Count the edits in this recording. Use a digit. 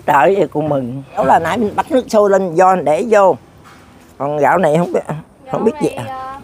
1